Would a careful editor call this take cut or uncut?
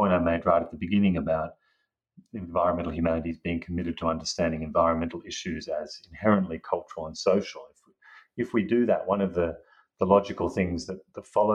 uncut